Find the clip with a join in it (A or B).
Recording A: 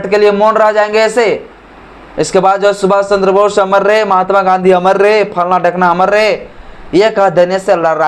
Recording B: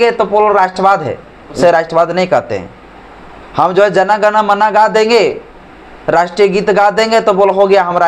B